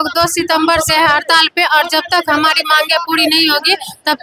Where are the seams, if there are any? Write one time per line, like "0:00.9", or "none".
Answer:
none